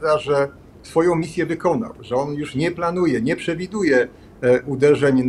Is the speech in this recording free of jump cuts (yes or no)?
yes